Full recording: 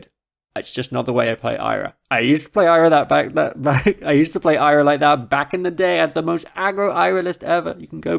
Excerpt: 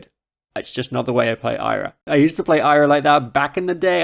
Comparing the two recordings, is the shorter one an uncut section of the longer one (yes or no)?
no